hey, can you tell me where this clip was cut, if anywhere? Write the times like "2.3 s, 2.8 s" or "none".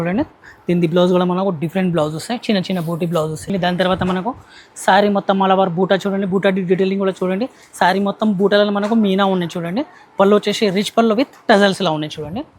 3.5 s